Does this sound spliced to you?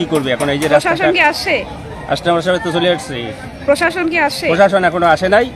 no; 0 cuts

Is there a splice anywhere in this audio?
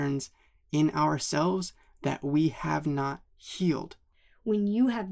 yes; 1 cut; at 4.1 s

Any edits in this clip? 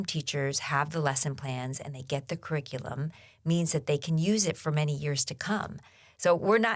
no; 0 cuts

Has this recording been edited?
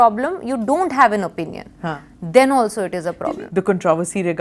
yes; 1 cut; at 3.2 s

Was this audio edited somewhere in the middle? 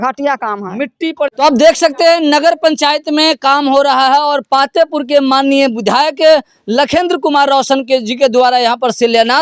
no; 0 cuts

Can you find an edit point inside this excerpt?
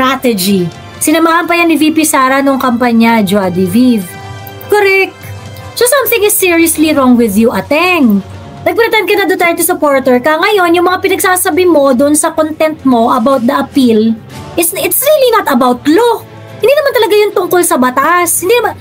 yes; 1 cut; at 8.3 s

